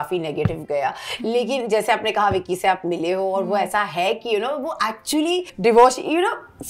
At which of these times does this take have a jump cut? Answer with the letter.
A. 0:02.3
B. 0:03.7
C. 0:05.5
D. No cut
C